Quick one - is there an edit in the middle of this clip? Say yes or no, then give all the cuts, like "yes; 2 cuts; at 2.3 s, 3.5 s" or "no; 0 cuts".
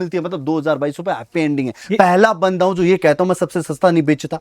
yes; 1 cut; at 1.7 s